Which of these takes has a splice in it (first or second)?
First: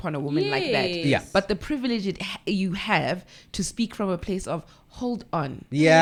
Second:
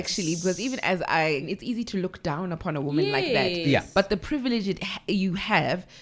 second